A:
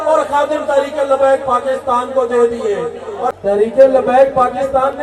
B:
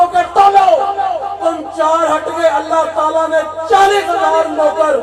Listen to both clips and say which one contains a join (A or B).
A